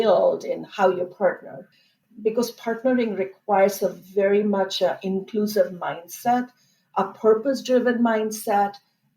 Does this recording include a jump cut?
yes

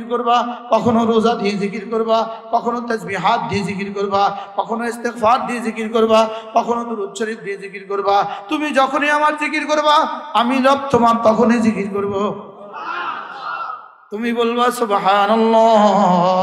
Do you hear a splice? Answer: no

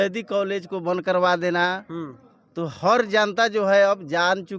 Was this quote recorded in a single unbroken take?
yes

